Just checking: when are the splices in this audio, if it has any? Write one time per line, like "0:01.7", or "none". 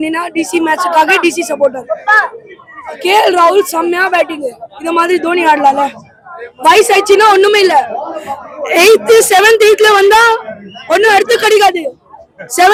none